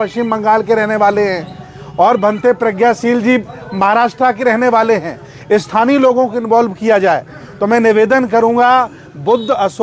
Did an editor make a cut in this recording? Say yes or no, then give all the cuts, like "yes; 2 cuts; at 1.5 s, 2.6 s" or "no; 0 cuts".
no; 0 cuts